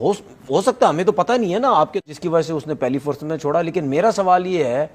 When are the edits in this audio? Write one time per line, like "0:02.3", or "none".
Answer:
0:02.0